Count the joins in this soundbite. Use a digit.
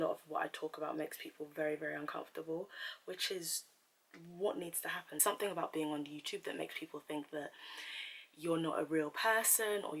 1